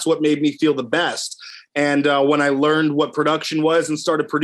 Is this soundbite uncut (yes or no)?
yes